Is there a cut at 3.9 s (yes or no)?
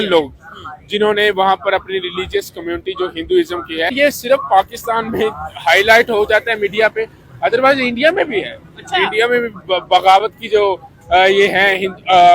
yes